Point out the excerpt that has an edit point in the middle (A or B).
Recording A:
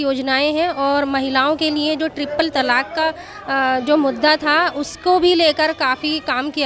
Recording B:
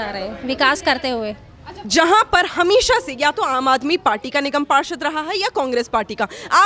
B